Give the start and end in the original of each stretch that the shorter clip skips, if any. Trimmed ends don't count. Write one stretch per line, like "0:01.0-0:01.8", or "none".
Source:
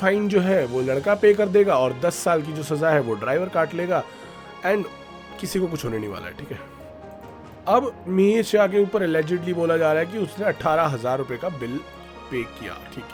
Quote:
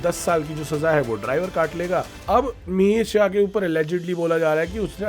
0:04.1-0:07.5